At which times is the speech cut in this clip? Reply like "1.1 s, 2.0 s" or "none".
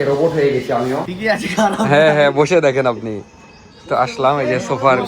1.1 s